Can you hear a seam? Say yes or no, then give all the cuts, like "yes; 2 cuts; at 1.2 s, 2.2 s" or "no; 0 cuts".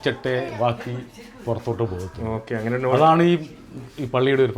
no; 0 cuts